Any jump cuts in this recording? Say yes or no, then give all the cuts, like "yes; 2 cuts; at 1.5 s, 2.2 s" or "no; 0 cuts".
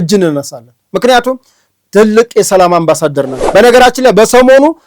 yes; 1 cut; at 3.3 s